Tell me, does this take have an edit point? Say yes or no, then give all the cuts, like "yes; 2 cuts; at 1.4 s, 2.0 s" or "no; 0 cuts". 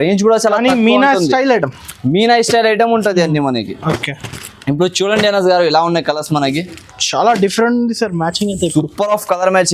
no; 0 cuts